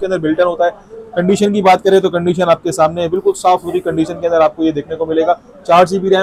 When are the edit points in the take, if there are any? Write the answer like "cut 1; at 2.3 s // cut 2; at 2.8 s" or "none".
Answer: none